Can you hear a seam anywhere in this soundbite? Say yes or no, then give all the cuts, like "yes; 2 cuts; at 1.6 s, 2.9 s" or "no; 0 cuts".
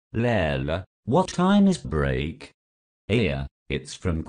no; 0 cuts